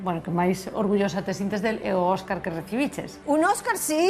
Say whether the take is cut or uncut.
cut